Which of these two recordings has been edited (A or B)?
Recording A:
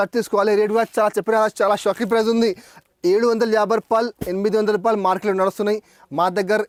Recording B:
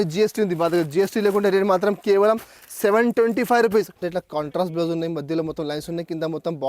B